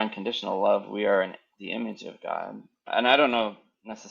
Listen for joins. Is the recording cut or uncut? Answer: cut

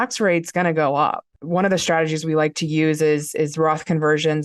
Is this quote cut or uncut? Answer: cut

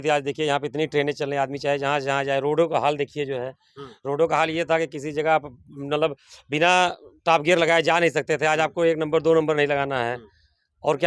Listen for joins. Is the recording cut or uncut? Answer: uncut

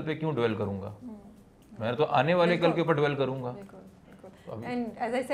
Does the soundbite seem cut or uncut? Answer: uncut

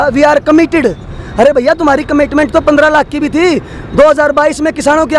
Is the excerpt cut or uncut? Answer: uncut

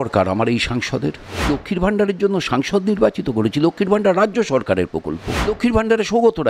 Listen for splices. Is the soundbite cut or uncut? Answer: cut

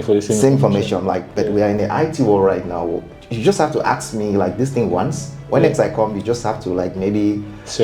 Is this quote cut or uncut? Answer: uncut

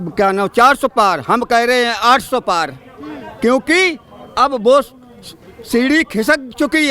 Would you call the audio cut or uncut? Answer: uncut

